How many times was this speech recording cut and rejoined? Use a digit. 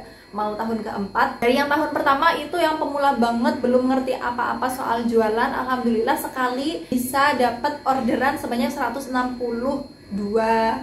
2